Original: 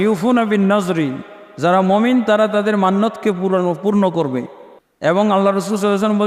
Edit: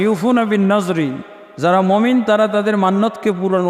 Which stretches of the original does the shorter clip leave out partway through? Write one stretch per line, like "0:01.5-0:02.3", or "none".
none